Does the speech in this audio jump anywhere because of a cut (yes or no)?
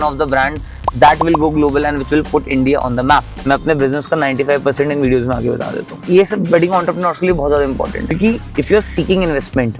yes